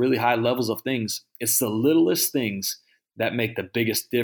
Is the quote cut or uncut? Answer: uncut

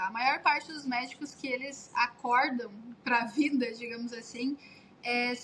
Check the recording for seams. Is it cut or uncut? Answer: uncut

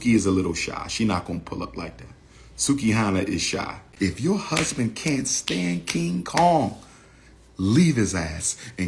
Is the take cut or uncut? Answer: cut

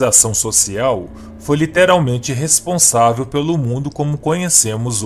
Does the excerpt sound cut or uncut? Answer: uncut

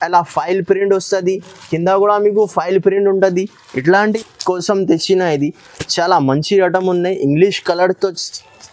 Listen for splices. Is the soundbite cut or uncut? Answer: cut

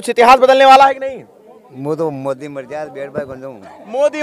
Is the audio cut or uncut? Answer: uncut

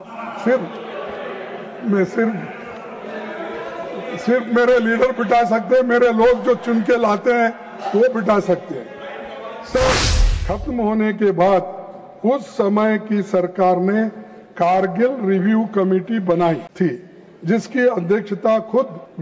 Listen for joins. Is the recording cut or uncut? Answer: cut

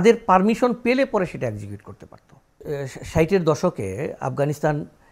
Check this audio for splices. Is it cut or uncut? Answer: cut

